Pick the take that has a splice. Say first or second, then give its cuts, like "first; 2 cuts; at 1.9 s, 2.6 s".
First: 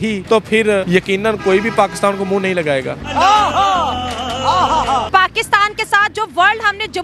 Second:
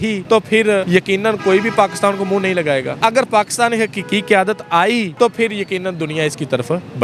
first; 2 cuts; at 2.9 s, 5.1 s